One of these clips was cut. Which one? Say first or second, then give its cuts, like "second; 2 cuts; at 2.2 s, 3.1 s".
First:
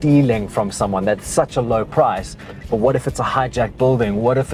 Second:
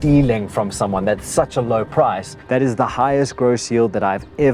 second; 1 cut; at 2.3 s